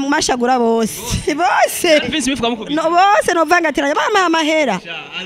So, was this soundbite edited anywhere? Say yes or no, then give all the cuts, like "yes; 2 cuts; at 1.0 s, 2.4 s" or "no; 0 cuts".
no; 0 cuts